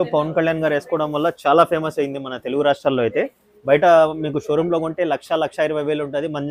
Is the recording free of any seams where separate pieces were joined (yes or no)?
yes